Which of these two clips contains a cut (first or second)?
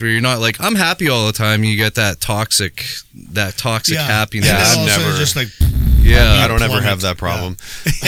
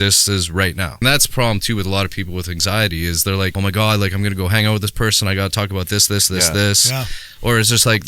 second